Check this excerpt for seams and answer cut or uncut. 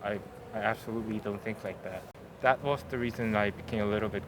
cut